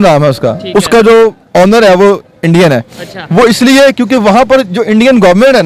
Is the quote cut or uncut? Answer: uncut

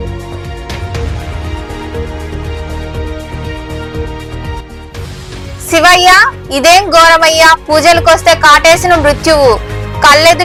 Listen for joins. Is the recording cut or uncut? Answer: uncut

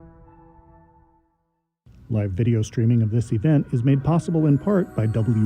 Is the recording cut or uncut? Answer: cut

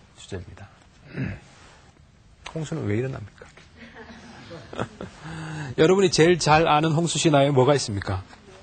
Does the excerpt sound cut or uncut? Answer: uncut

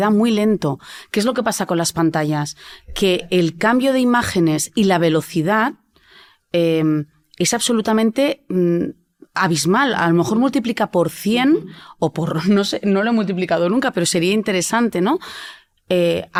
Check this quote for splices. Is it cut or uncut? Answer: uncut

